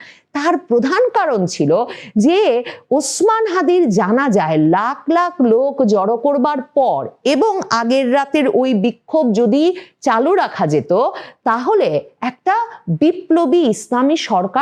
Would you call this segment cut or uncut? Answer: uncut